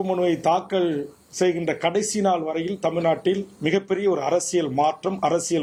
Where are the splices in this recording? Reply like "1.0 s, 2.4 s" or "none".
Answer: none